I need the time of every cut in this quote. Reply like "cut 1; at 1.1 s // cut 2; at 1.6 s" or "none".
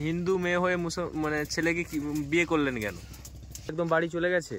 cut 1; at 3.6 s

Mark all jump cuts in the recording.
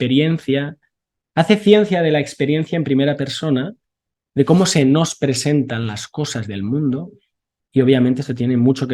none

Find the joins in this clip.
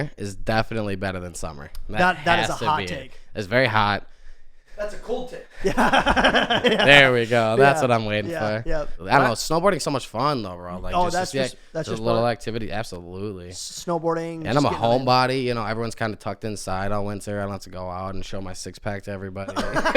cut 1; at 8.9 s

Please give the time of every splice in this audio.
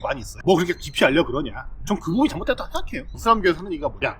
cut 1; at 1.8 s // cut 2; at 3.2 s

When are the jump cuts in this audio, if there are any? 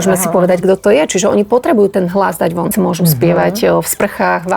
cut 1; at 2.7 s

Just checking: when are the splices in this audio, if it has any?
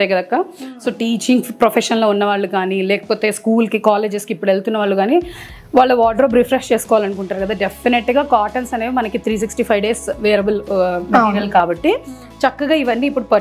none

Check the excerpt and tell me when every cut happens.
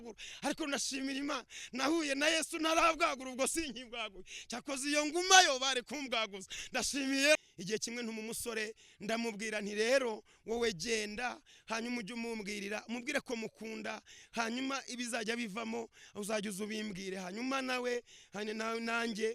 cut 1; at 7.4 s

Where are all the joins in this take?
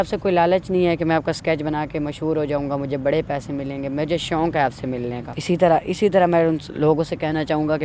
cut 1; at 5.3 s

